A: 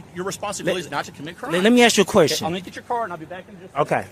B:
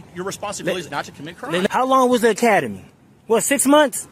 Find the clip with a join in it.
B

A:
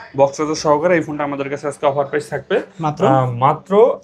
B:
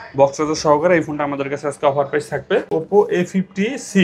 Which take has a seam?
B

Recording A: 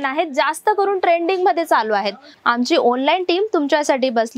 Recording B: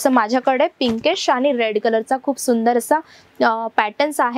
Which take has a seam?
A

